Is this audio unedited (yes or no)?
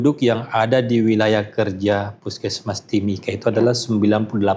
yes